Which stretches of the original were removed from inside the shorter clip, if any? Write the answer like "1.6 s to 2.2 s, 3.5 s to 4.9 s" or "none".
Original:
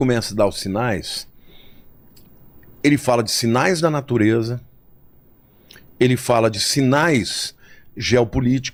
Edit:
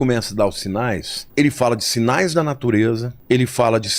1.2 s to 2.6 s, 4.6 s to 5.8 s